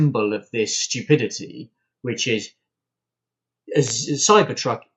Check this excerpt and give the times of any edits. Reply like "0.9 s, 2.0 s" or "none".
none